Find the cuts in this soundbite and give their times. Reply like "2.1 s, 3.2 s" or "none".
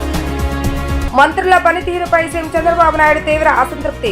1.0 s